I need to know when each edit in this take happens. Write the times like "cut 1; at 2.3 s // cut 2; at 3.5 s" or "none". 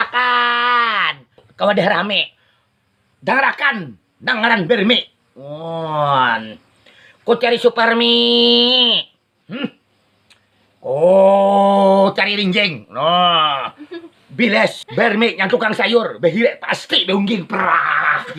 none